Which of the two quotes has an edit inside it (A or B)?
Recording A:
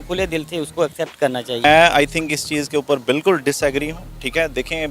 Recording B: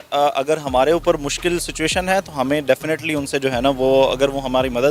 A